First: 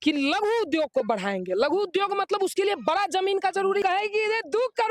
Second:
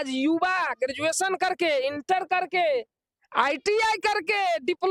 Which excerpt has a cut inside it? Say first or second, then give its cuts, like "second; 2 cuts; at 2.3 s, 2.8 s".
first; 1 cut; at 3.8 s